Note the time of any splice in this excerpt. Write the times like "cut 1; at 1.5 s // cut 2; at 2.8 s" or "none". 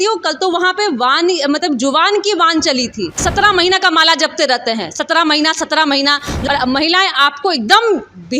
cut 1; at 3.2 s // cut 2; at 6.3 s